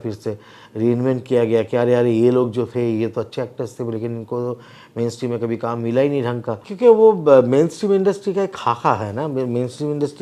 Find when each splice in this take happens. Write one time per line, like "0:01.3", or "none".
0:06.7